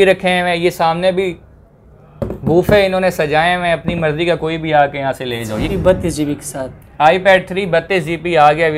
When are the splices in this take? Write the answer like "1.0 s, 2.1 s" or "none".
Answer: 5.7 s